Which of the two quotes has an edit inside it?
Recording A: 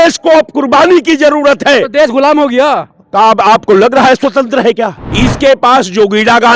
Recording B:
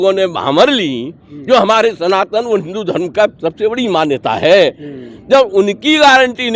A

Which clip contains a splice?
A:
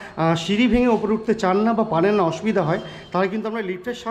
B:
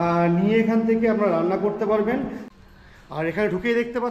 B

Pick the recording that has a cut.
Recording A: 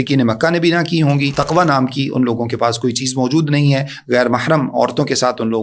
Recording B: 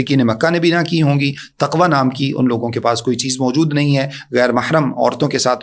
A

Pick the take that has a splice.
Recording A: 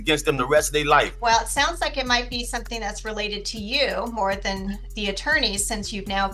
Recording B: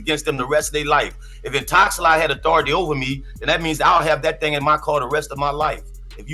A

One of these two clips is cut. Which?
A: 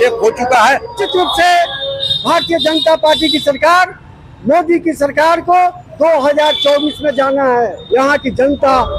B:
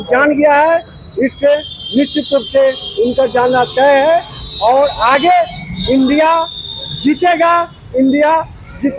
A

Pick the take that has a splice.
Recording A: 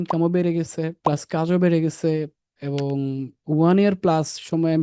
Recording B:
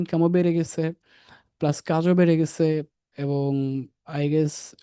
A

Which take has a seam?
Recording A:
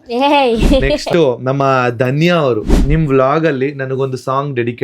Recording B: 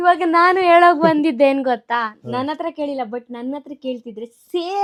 A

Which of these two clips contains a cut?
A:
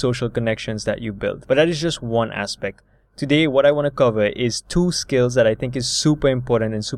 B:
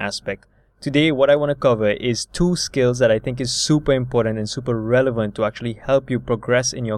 A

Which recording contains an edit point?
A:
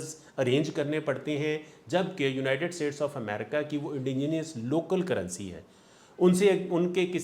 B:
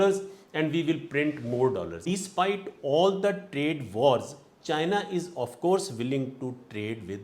B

